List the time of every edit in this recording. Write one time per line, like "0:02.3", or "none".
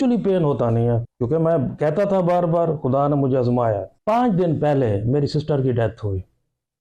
0:01.1
0:03.9